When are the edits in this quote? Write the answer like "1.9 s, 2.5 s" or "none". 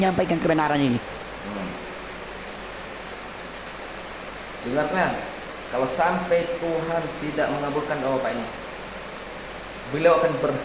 none

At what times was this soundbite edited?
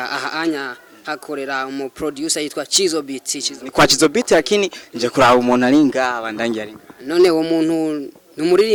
none

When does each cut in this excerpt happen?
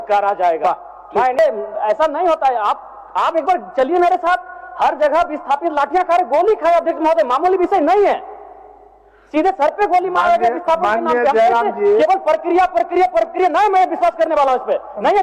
1.4 s

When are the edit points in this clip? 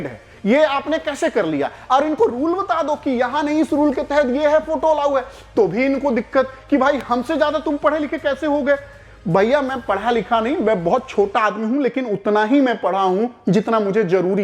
none

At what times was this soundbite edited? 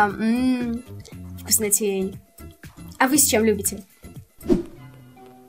4.5 s

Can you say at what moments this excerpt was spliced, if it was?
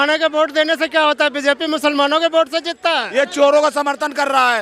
3.1 s

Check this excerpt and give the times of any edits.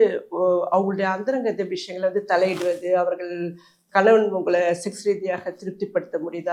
none

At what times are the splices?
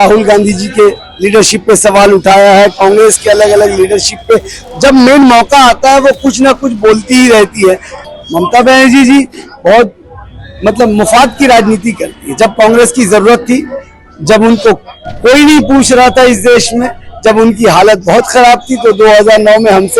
7.9 s

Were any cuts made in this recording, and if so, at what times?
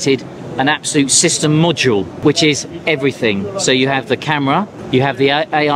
2.2 s, 4.8 s

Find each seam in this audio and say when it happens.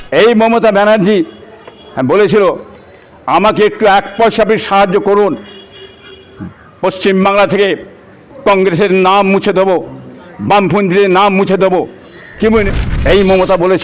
12.7 s

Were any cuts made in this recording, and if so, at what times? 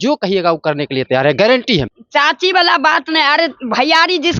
2.0 s

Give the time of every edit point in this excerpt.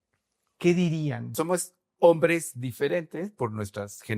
1.2 s

